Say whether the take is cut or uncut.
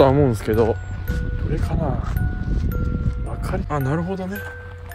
cut